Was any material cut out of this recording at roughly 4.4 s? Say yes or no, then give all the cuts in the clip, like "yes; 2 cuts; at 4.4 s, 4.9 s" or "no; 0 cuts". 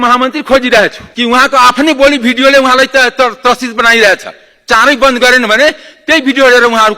no; 1 cut; at 1.0 s